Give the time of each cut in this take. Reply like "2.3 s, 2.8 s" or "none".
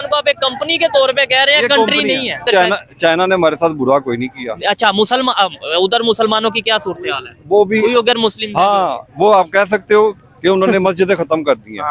2.5 s